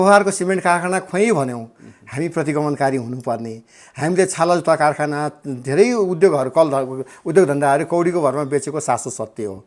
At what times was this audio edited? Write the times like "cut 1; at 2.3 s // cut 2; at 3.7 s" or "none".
none